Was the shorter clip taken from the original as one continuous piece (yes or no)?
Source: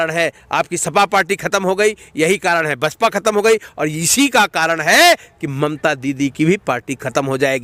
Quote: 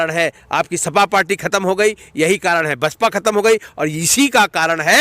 yes